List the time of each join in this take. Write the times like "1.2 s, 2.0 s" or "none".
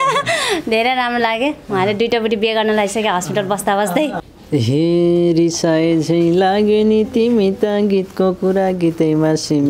4.2 s

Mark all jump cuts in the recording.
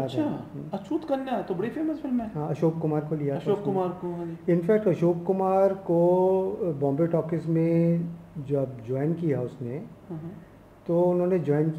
none

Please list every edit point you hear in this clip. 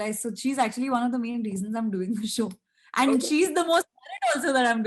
none

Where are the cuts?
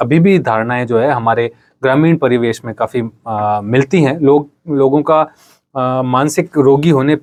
none

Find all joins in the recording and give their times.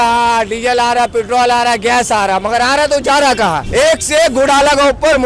3.6 s

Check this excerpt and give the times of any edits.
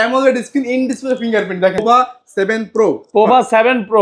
1.8 s

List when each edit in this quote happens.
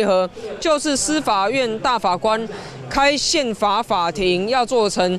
none

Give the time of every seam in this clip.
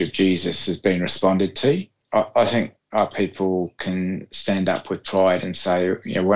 2.0 s

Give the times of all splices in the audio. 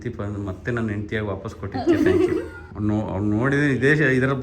2.6 s

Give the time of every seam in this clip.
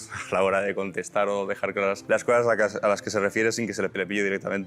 2.0 s, 3.9 s

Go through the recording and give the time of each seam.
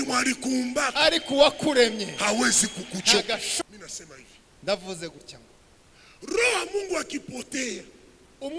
3.6 s

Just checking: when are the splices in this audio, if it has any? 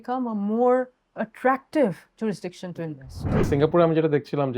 3.5 s

